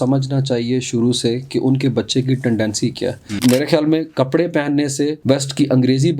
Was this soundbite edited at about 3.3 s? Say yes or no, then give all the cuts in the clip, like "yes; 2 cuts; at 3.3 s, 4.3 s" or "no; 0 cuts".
yes; 1 cut; at 3.3 s